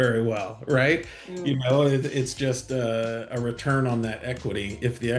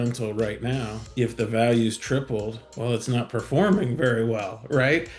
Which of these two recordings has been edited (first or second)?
second